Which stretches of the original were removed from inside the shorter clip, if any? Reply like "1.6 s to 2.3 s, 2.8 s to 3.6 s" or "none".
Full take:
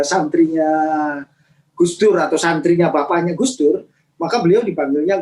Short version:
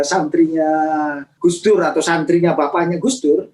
1.2 s to 1.6 s